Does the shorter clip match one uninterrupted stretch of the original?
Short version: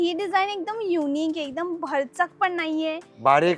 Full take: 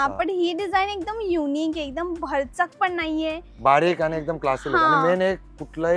yes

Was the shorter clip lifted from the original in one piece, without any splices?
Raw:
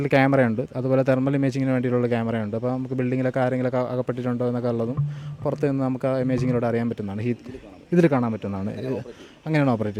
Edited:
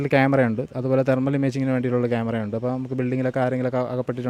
yes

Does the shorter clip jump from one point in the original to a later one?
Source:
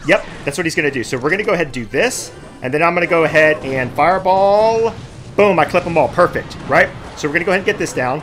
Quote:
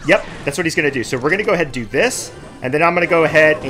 no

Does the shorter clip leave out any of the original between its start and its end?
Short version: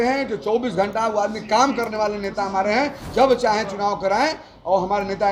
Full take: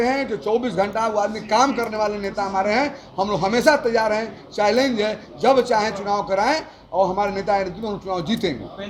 yes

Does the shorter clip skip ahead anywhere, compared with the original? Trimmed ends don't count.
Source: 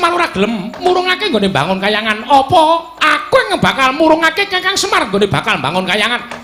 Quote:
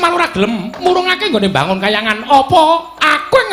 no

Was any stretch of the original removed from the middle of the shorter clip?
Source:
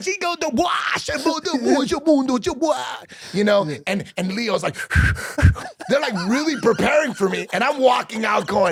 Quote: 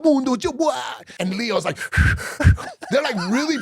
yes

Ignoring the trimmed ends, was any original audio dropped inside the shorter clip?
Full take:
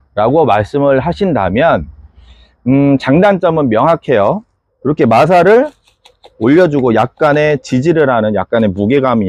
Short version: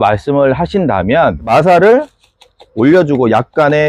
yes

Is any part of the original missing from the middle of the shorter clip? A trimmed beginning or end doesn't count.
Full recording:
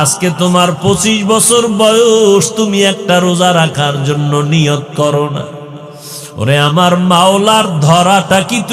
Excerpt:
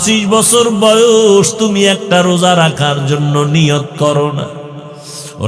no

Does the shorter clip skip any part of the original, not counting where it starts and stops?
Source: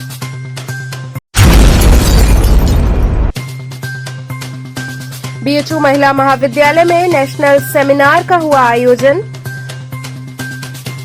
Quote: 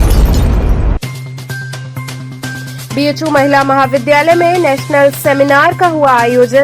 yes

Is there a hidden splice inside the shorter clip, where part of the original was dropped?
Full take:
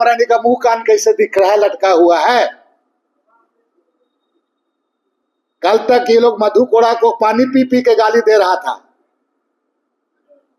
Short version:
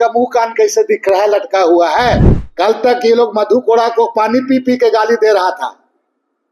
yes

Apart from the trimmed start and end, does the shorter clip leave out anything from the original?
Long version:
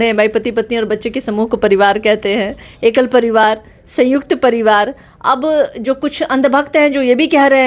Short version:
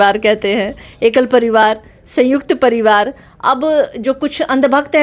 no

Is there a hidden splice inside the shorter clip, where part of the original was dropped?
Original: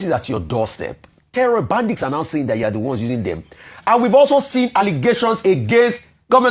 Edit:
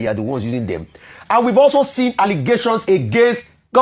no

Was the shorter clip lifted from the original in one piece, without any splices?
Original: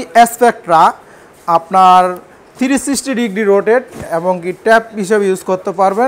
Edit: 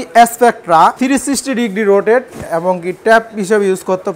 no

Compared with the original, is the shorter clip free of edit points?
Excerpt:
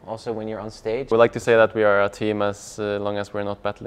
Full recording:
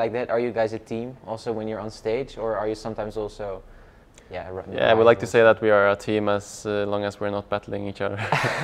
no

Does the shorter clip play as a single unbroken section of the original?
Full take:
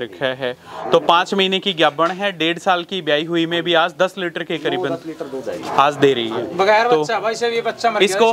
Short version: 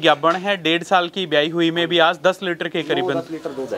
yes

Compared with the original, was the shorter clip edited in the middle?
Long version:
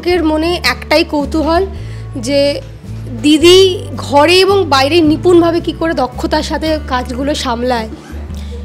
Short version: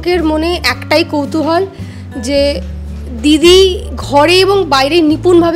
no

